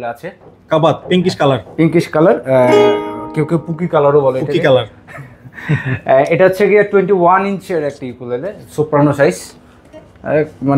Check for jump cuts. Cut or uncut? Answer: uncut